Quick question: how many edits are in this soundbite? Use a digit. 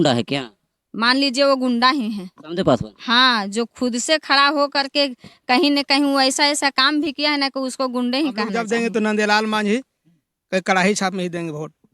1